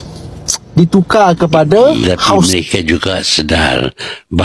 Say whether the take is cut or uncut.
cut